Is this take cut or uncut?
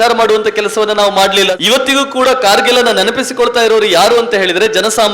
cut